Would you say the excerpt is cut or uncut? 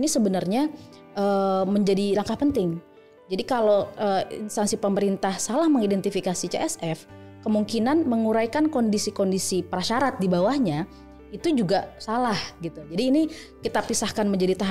uncut